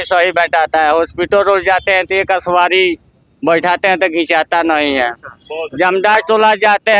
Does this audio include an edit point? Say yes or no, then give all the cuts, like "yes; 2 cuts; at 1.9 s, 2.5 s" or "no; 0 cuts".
no; 0 cuts